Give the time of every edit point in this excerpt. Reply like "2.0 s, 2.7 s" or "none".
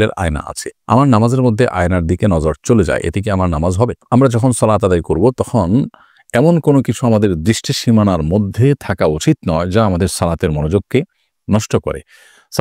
none